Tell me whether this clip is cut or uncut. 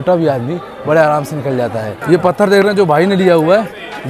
cut